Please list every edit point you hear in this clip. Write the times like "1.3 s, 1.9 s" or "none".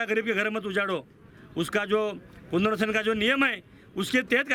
none